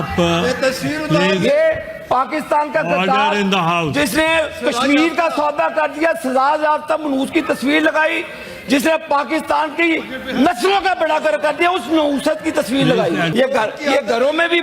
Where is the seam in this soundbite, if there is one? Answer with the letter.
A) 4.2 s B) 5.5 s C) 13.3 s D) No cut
C